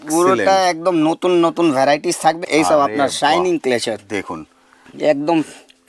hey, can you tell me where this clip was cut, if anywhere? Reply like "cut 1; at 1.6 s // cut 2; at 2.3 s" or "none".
cut 1; at 2.4 s